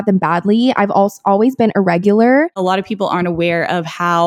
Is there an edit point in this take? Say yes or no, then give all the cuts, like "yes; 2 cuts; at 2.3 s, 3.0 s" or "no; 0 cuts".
yes; 1 cut; at 2.5 s